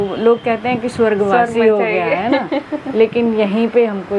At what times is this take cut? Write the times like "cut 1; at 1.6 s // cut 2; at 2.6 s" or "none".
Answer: none

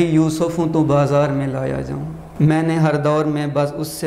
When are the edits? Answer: cut 1; at 2.2 s

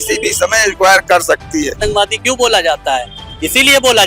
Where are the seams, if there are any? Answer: cut 1; at 1.8 s

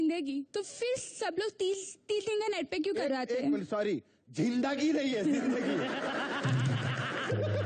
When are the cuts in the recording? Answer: none

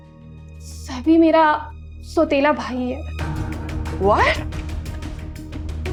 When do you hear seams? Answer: none

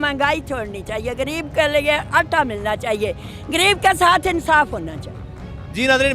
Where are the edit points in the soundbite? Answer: none

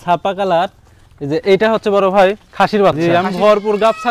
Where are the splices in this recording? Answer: cut 1; at 3.0 s

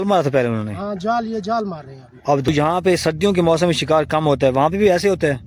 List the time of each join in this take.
cut 1; at 2.5 s

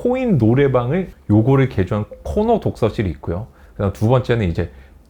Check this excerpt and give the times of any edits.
cut 1; at 1.1 s

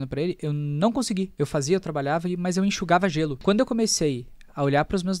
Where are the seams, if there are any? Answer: cut 1; at 1.3 s // cut 2; at 3.4 s

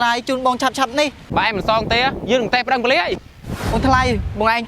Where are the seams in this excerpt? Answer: cut 1; at 1.2 s // cut 2; at 3.7 s

